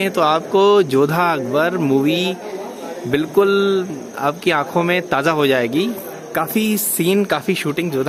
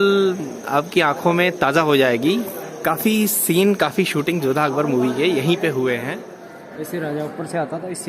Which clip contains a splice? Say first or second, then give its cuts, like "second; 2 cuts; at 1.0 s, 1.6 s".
second; 1 cut; at 6.2 s